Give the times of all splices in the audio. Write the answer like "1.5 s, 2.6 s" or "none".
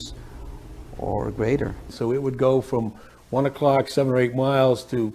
1.8 s